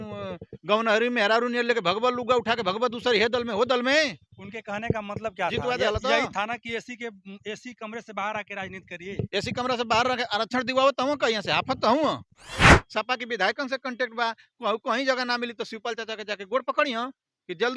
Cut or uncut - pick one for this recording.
cut